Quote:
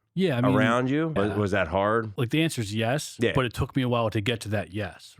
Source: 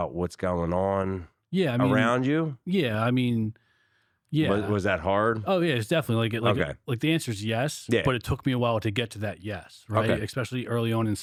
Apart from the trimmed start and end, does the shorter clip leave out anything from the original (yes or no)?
yes